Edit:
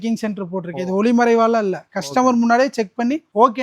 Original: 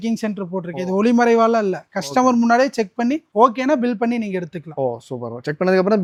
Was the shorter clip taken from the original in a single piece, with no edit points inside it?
yes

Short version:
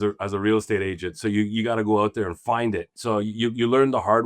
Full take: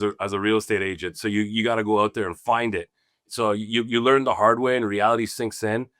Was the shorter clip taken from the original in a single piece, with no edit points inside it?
no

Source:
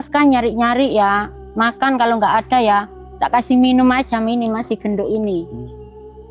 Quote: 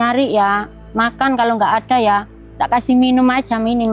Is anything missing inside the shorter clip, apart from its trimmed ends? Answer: no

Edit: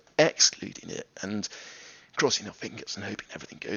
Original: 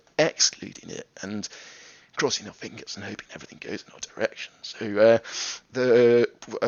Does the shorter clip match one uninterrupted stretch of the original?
yes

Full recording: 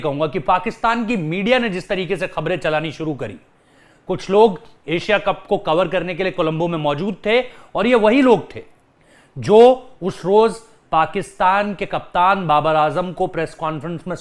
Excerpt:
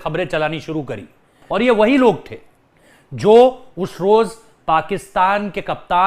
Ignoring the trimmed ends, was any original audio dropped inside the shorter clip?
yes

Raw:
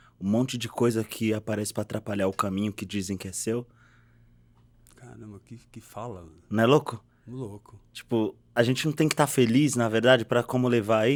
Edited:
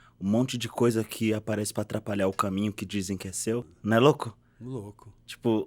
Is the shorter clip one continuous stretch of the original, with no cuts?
no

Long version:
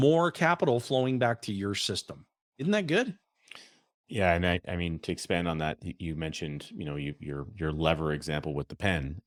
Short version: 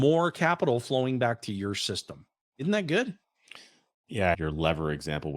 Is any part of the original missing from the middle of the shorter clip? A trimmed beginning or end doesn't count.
yes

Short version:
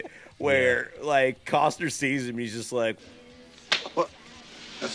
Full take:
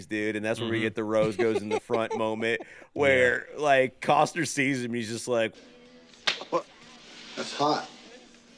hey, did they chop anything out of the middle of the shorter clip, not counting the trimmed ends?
no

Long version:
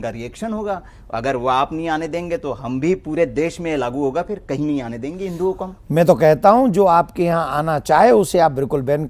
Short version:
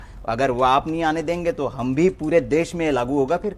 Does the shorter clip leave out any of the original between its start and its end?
no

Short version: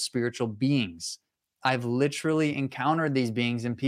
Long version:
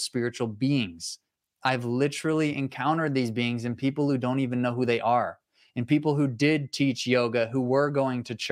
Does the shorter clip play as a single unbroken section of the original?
yes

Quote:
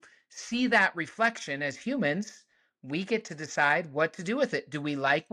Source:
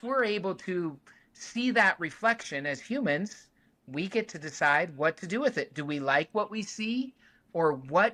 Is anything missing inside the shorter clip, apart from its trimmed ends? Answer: no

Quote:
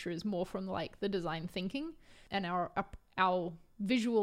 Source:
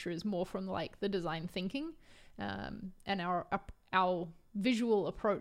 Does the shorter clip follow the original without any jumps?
no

